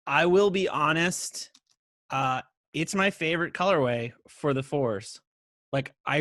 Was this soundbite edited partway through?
no; 0 cuts

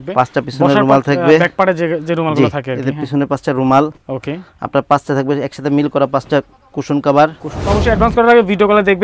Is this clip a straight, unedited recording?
no; 1 cut; at 7.7 s

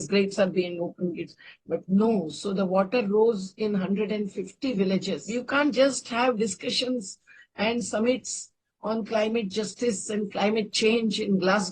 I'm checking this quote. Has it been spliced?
yes; 1 cut; at 5.2 s

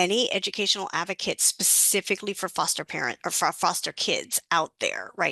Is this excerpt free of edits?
yes; 0 cuts

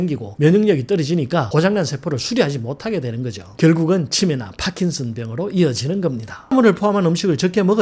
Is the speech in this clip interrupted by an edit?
yes; 1 cut; at 6.5 s

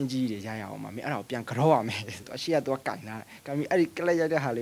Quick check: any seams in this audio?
yes; 1 cut; at 2.3 s

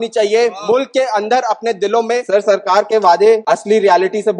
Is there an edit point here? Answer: yes; 2 cuts; at 2.2 s, 3.4 s

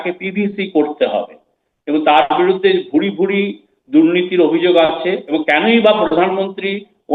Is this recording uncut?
no; 1 cut; at 5.2 s

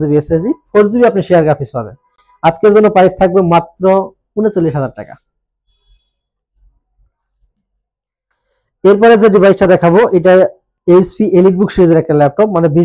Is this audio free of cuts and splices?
yes; 0 cuts

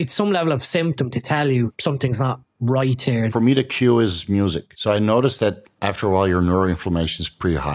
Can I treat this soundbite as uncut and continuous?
no; 3 cuts; at 1.8 s, 3.3 s, 4.7 s

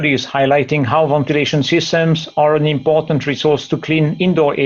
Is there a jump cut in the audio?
no; 0 cuts

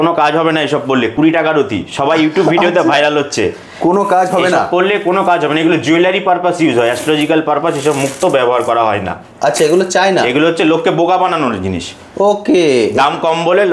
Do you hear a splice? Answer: no; 0 cuts

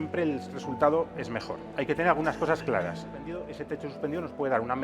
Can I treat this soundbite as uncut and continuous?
no; 1 cut; at 3.5 s

